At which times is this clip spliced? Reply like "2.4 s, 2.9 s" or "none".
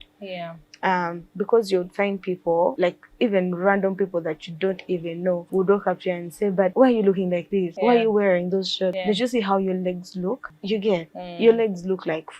2.8 s, 5.4 s, 6.7 s, 7.7 s, 9.0 s, 10.5 s